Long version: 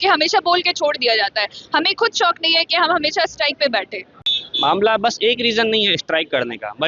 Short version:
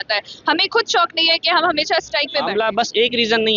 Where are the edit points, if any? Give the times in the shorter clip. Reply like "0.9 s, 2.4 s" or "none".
2.5 s